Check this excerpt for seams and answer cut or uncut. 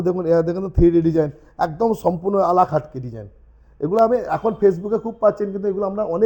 uncut